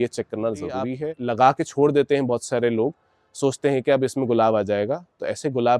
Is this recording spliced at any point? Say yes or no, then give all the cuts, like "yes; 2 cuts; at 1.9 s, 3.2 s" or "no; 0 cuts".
yes; 1 cut; at 1.0 s